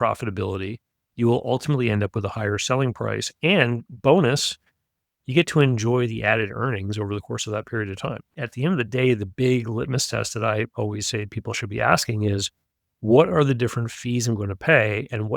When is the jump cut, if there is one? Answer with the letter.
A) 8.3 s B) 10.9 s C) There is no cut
A